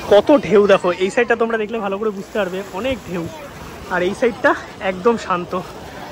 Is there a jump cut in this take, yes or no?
no